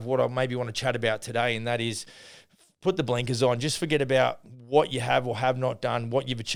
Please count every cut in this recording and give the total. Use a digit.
0